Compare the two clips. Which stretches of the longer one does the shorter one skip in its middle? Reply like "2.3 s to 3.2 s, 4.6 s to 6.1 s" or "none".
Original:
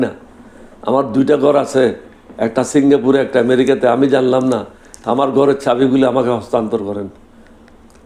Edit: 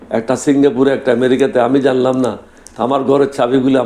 none

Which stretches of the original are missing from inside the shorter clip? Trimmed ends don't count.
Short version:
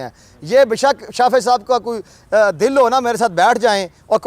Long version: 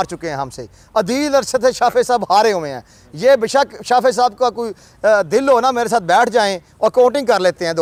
none

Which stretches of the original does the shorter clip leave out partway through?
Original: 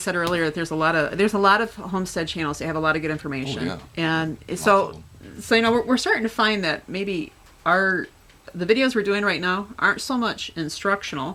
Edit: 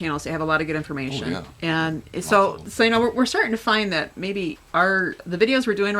5.0 s to 5.3 s, 7.5 s to 8.1 s

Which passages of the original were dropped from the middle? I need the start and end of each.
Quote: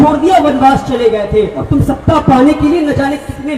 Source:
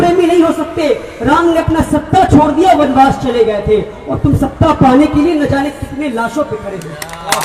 3.9 s to 4.1 s

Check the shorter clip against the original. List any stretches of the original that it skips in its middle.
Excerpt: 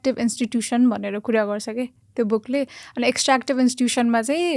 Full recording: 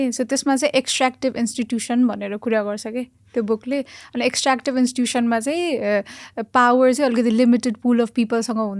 none

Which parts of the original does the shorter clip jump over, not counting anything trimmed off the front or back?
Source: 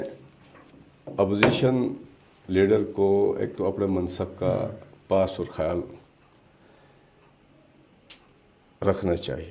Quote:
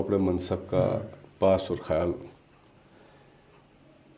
none

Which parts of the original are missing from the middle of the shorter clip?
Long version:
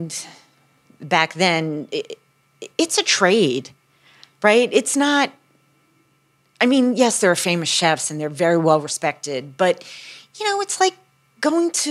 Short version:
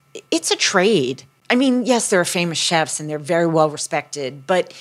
3.8 s to 6.4 s

